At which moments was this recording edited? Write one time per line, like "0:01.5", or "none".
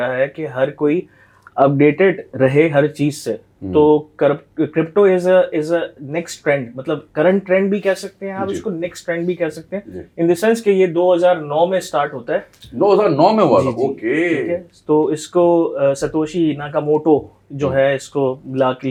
none

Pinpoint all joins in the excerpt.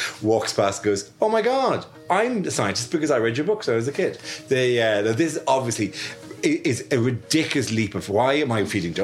none

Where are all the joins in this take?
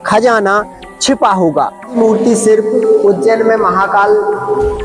0:02.0

